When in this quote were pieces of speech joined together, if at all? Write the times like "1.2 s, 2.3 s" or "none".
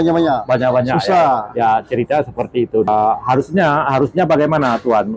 2.9 s